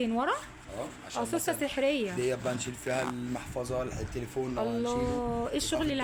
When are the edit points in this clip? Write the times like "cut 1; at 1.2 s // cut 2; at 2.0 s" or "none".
none